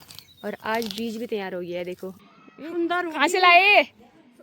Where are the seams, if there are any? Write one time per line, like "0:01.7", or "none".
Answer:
0:02.2